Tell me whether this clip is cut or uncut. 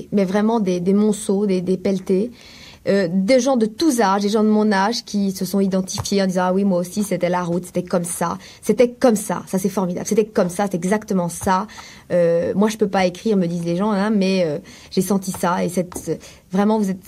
uncut